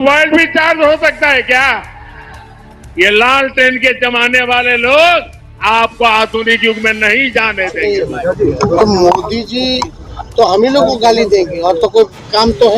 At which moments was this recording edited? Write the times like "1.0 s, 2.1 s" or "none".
7.8 s